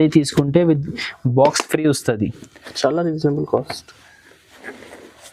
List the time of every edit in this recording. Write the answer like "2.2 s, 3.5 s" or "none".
none